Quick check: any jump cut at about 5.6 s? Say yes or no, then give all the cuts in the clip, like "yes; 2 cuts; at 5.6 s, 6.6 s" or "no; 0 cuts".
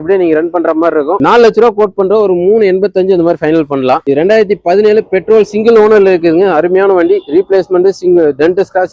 no; 1 cut; at 1.2 s